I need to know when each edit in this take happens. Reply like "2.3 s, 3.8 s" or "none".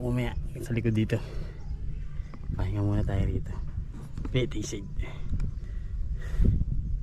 none